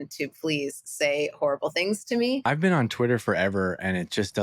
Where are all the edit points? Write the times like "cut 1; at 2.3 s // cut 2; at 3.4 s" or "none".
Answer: cut 1; at 2.4 s